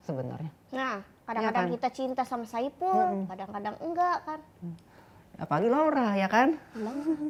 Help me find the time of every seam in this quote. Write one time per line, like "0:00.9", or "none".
none